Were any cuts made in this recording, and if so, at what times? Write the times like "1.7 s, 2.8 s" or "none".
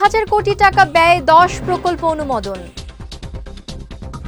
2.6 s